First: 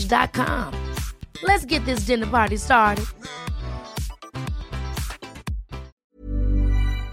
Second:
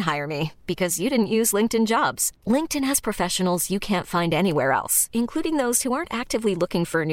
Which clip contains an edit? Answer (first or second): first